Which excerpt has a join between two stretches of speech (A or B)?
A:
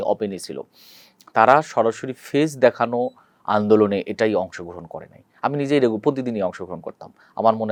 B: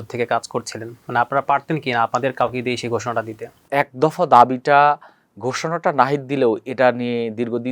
B